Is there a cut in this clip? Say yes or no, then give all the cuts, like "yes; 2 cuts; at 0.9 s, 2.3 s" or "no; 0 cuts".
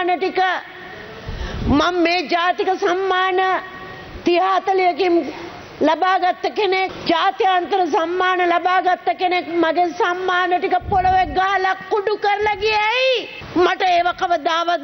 yes; 2 cuts; at 7.0 s, 13.4 s